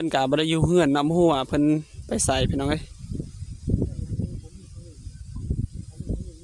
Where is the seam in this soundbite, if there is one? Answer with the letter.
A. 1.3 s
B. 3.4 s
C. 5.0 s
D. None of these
D